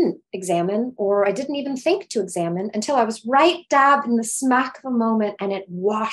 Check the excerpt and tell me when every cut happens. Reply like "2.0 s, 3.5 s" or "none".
none